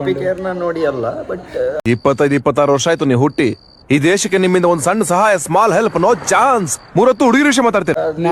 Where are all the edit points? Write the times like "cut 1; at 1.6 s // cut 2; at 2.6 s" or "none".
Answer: none